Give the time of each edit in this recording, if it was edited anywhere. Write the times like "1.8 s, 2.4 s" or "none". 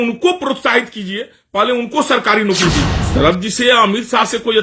3.0 s